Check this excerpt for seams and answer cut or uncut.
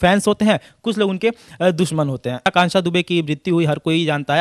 cut